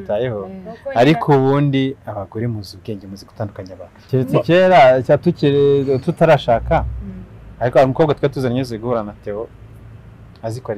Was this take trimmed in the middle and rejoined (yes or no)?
yes